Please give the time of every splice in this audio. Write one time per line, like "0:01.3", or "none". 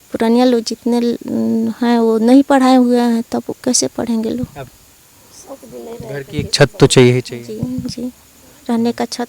0:04.6

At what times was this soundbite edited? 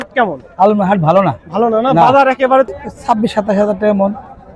0:02.7

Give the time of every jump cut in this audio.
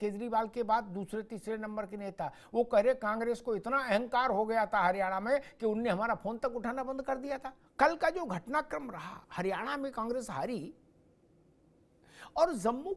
0:07.5

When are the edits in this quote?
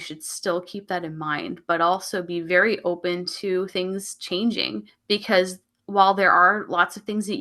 0:04.9

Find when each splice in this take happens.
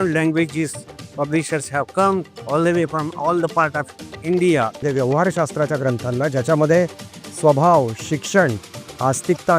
0:04.8

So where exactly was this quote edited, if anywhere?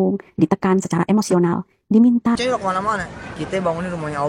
0:02.3

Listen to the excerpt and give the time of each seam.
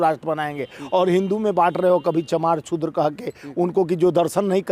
none

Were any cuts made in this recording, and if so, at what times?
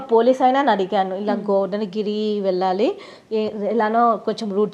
none

